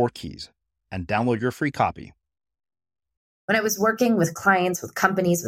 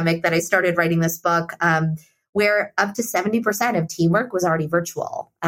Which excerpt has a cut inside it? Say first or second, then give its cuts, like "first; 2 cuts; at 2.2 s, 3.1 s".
first; 1 cut; at 3.3 s